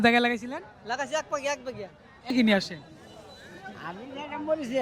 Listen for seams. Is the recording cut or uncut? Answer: cut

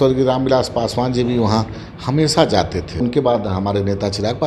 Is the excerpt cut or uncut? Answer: cut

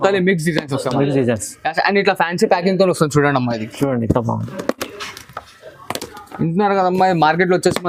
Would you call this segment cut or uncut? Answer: uncut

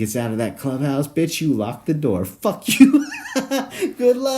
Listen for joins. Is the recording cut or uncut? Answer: uncut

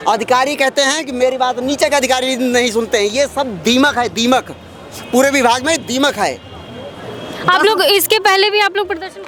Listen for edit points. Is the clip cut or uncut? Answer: uncut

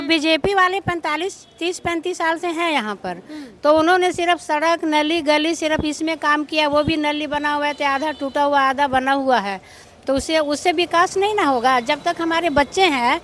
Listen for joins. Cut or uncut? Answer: uncut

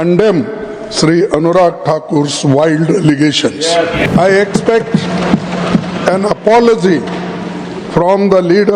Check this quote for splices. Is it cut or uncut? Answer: cut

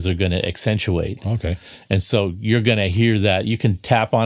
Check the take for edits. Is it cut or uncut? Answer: uncut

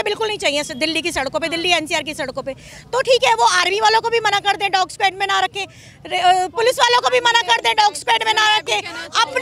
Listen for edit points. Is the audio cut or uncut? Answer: uncut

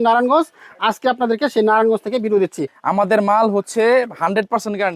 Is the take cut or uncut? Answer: cut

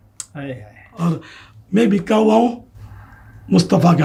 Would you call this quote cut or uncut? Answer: uncut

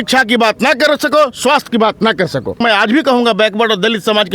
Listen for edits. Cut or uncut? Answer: cut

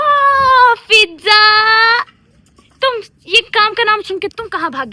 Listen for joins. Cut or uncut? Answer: uncut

